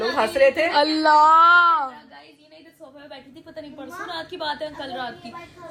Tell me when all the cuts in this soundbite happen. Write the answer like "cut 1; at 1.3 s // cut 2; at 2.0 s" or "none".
none